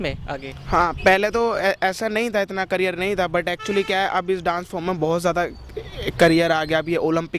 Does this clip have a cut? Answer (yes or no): no